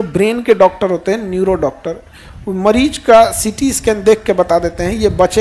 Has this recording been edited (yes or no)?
no